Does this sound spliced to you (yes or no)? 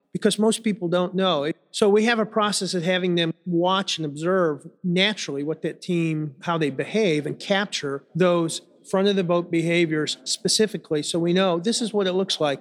yes